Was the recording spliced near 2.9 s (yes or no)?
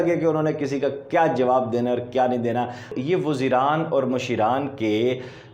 yes